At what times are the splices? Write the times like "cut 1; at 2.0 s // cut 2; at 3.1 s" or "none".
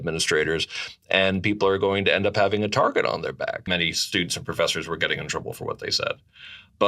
cut 1; at 3.6 s